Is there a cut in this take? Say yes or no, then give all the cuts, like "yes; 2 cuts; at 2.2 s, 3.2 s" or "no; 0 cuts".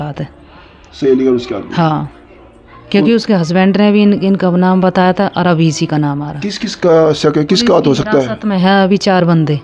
no; 0 cuts